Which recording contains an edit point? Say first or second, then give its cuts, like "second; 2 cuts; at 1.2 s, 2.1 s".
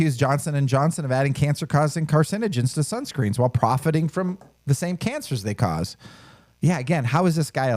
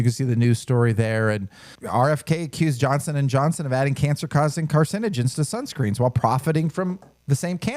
second; 1 cut; at 1.7 s